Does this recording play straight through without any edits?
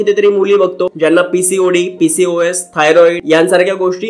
no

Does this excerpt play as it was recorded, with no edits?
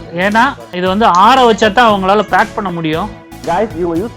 no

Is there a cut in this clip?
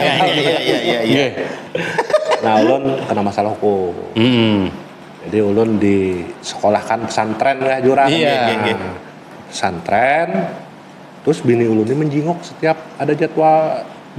no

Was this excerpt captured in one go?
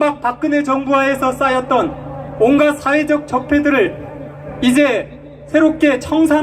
no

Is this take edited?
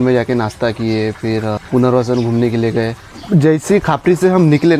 no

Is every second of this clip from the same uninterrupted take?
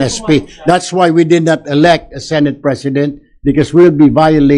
yes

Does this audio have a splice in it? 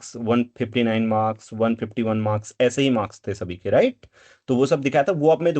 no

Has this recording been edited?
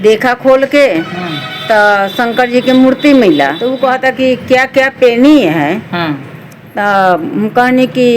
yes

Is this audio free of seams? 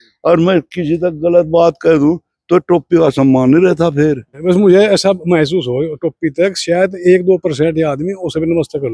no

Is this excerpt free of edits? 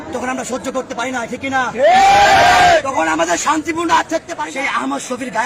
no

